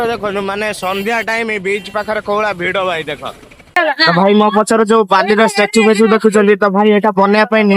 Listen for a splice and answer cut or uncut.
cut